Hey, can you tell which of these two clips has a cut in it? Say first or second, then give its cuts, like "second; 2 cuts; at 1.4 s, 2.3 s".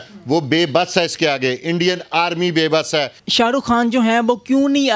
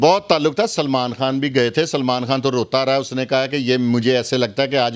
first; 1 cut; at 3.2 s